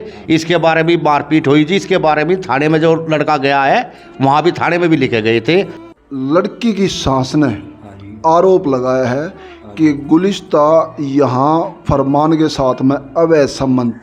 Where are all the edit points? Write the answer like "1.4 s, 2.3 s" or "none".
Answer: 5.8 s